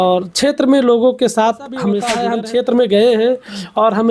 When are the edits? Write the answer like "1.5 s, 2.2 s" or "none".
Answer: 2.1 s